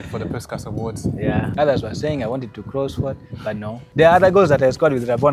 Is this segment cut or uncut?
cut